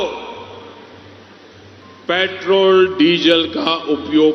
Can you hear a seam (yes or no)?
no